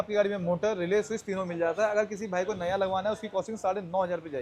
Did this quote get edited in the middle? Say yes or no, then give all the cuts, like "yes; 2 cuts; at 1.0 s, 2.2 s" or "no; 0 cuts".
no; 0 cuts